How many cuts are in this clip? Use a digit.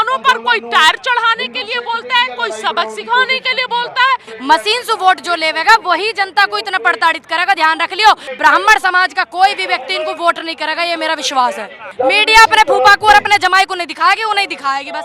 3